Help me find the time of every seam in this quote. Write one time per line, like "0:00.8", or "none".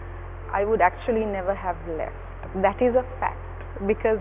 none